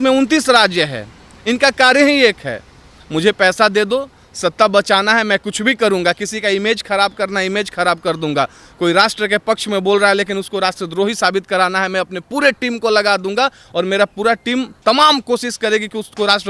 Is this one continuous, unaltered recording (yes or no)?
yes